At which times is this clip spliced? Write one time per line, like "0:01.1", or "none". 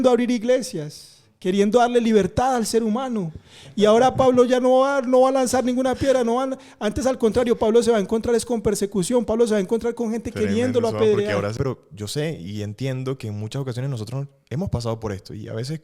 0:11.5